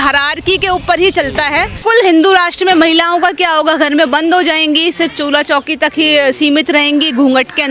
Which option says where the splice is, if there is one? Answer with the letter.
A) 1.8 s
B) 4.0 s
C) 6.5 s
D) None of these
A